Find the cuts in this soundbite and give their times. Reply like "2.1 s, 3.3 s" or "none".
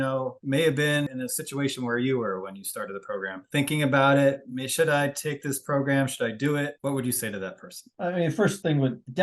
none